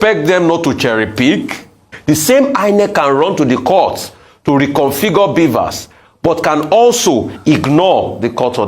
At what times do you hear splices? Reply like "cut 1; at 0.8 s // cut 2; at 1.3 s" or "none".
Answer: cut 1; at 1.9 s